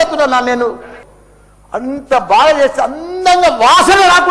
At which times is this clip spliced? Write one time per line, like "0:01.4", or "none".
0:00.9